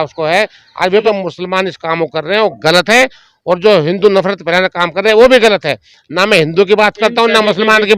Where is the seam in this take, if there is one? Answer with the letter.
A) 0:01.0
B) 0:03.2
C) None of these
A